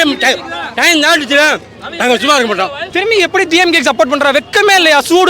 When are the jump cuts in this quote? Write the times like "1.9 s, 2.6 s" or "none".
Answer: 2.8 s